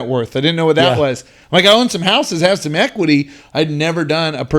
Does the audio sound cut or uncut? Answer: uncut